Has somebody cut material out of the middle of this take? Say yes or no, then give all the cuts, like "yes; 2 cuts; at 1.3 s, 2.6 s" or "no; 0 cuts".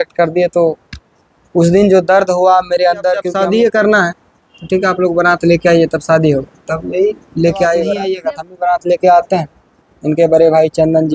yes; 2 cuts; at 3.3 s, 8.0 s